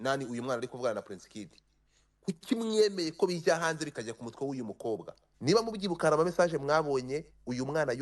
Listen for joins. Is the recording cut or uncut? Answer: cut